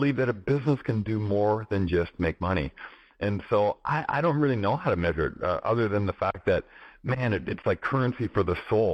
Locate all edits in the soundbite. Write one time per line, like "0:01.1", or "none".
none